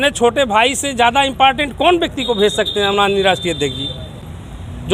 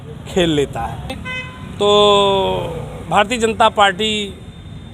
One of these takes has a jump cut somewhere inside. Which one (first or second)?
second